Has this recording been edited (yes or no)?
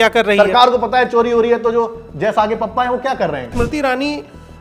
yes